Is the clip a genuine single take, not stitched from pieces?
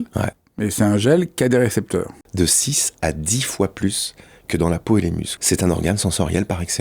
no; 2 cuts; at 2.2 s, 5.3 s

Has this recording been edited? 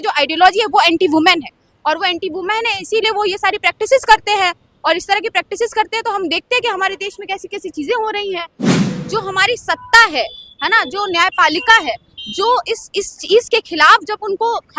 yes; 1 cut; at 8.7 s

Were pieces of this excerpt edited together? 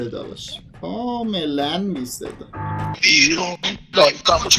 yes; 1 cut; at 3.0 s

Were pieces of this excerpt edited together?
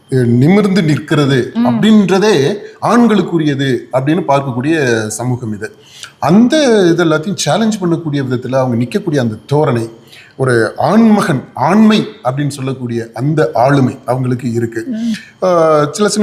no; 0 cuts

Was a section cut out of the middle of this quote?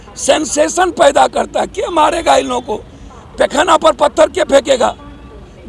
no; 0 cuts

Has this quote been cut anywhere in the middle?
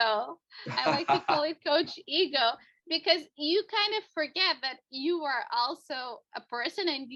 no; 0 cuts

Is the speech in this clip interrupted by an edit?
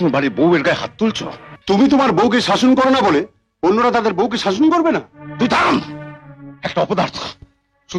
yes; 1 cut; at 1.6 s

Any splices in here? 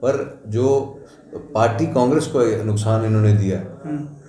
no; 0 cuts

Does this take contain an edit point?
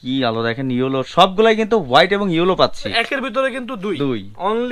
yes; 1 cut; at 2.9 s

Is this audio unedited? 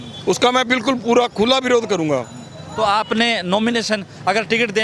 yes; 0 cuts

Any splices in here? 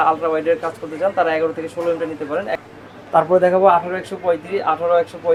no; 0 cuts

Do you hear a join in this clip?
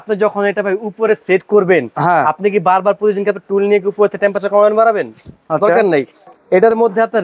no; 0 cuts

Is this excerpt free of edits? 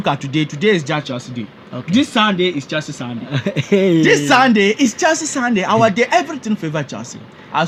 yes; 0 cuts

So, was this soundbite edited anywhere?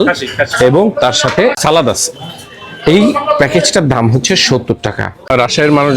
yes; 2 cuts; at 1.6 s, 5.2 s

